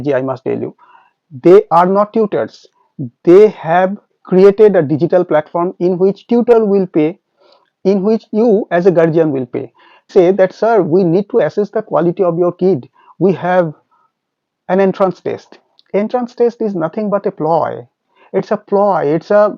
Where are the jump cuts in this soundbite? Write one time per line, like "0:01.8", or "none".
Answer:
0:10.1